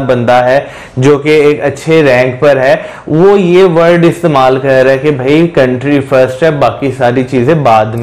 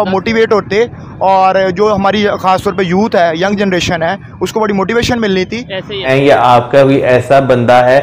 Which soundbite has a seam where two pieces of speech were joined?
second; 1 cut; at 6.1 s

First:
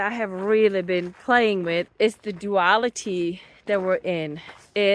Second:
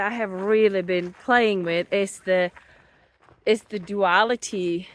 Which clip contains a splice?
first; 1 cut; at 1.9 s

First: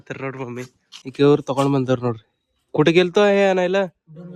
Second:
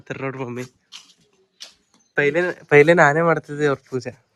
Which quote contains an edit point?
first; 1 cut; at 1.0 s

